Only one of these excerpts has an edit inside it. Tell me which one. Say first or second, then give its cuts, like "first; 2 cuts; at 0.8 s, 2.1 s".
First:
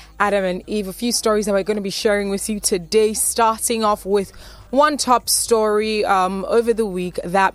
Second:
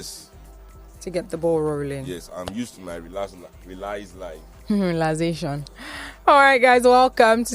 second; 1 cut; at 1.9 s